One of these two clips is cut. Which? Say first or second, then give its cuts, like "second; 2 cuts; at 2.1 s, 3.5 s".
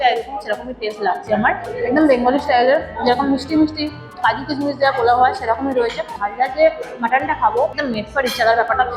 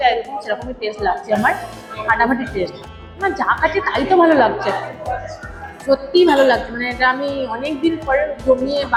first; 3 cuts; at 1.7 s, 6.2 s, 7.8 s